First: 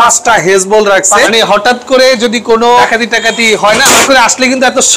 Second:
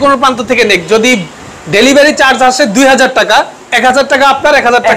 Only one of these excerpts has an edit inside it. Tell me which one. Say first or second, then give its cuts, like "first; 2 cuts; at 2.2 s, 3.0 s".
first; 3 cuts; at 1.3 s, 2.8 s, 4.0 s